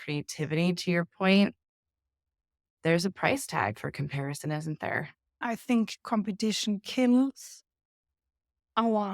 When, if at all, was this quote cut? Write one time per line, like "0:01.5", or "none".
0:05.4